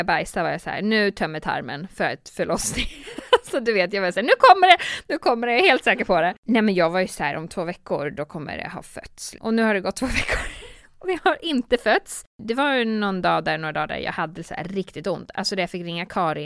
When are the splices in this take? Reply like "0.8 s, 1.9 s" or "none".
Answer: 6.4 s, 9.4 s, 12.4 s